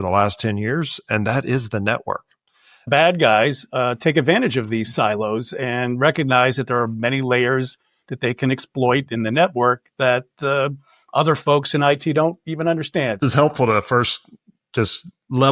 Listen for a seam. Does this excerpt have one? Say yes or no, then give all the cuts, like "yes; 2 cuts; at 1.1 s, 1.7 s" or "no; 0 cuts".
yes; 2 cuts; at 2.9 s, 13.2 s